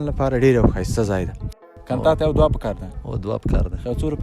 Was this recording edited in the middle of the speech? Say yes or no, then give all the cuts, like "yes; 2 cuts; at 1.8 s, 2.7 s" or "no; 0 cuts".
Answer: yes; 1 cut; at 1.8 s